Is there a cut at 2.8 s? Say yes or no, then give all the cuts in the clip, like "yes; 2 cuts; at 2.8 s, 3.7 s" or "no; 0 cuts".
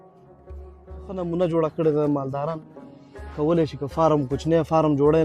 no; 1 cut; at 1.2 s